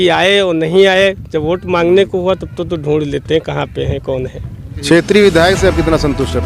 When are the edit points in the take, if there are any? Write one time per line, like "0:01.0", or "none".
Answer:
0:04.7